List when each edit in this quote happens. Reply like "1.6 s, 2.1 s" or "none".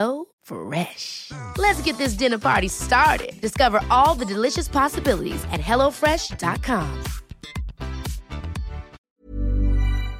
9.1 s